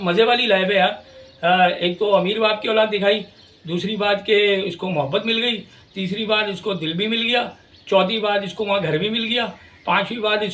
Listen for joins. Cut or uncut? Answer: uncut